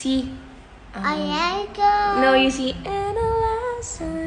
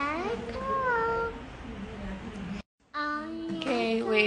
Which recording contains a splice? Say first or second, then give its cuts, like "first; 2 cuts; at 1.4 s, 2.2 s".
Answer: second; 1 cut; at 2.7 s